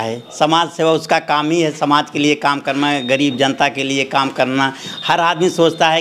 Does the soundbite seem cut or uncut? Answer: uncut